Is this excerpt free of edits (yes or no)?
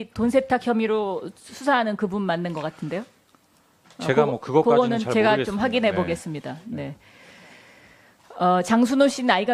no